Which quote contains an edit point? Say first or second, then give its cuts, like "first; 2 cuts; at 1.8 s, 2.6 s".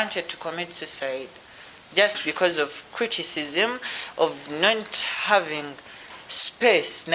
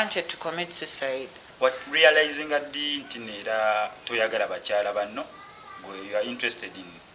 second; 1 cut; at 1.4 s